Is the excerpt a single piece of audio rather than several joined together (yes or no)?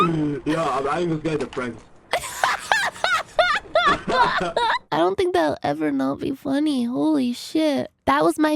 yes